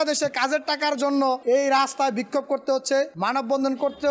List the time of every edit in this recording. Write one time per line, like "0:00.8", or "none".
0:01.4
0:03.1